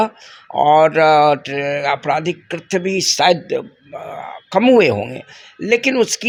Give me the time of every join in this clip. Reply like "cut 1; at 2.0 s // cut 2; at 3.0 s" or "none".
none

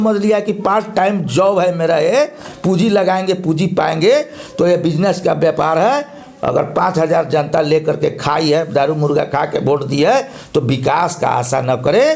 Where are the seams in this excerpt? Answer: none

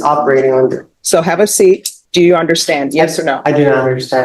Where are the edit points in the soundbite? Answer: cut 1; at 0.9 s // cut 2; at 2.0 s

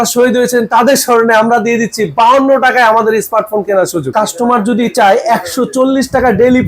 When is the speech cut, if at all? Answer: cut 1; at 4.1 s

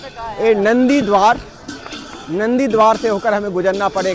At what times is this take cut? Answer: none

